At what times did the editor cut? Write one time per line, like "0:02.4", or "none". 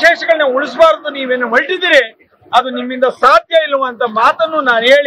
none